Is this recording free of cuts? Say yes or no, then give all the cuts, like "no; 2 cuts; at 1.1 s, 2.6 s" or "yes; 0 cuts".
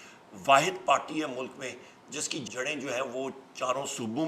no; 1 cut; at 2.5 s